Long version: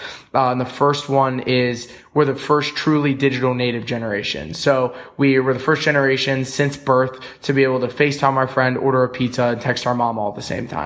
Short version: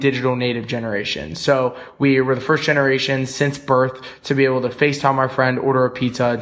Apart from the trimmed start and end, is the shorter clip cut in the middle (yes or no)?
no